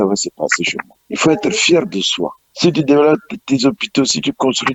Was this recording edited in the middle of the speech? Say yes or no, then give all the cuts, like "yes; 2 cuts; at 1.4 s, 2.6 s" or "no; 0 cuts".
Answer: no; 0 cuts